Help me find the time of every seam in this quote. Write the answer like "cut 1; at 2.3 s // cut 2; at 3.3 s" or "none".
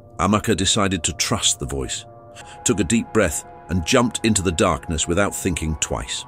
cut 1; at 2.5 s

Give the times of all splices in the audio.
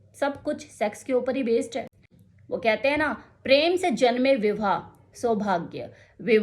cut 1; at 1.9 s

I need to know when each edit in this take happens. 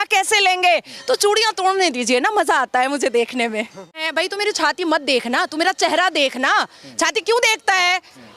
cut 1; at 4.0 s

